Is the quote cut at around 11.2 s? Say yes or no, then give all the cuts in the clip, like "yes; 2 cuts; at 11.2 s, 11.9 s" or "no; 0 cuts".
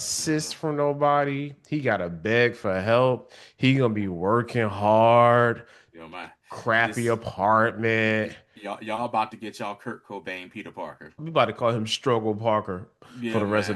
yes; 1 cut; at 11.2 s